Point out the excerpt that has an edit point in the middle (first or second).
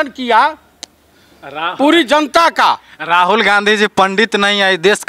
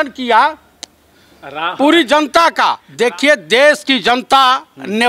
second